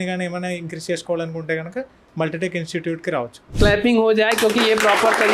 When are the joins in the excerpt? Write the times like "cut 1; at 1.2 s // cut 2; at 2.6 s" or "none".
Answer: cut 1; at 3.5 s